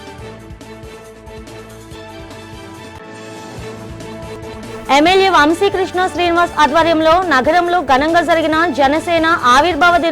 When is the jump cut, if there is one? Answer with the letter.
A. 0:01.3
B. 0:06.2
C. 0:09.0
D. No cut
A